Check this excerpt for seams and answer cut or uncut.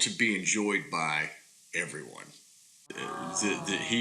cut